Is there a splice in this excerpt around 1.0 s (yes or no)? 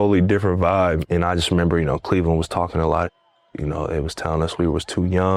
yes